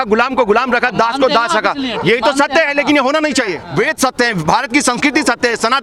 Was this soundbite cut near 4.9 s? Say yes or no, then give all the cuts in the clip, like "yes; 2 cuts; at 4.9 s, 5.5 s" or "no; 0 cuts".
no; 1 cut; at 3.6 s